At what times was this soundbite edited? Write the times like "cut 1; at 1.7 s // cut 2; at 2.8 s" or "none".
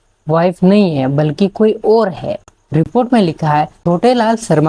cut 1; at 2.9 s // cut 2; at 3.7 s